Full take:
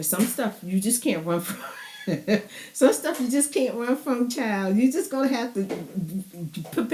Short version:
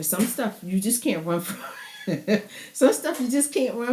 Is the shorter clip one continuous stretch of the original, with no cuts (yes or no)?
yes